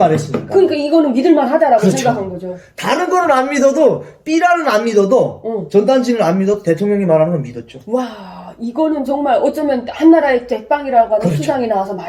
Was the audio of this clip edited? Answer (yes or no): no